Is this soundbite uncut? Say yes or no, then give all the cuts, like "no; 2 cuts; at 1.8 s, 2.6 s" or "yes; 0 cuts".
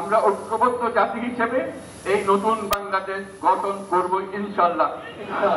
yes; 0 cuts